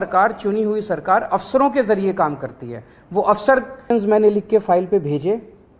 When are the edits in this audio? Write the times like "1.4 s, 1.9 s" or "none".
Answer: 3.8 s